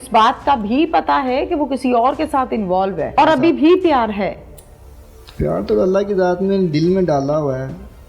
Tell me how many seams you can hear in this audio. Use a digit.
1